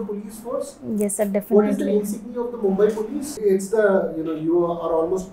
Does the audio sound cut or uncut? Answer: cut